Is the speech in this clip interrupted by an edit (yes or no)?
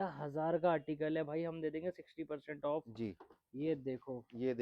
no